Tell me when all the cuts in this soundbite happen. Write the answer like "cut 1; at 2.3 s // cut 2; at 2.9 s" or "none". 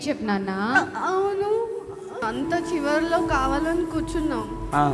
cut 1; at 2.2 s